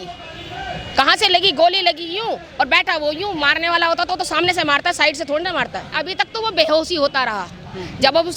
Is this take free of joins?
no; 1 cut; at 5.9 s

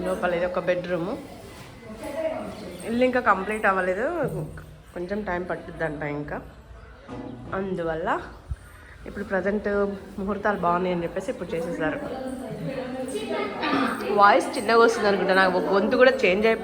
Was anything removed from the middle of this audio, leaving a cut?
no; 0 cuts

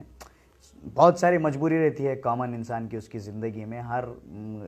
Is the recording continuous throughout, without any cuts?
yes; 0 cuts

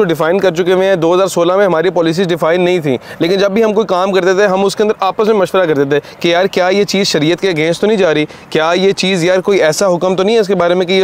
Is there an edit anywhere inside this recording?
no; 0 cuts

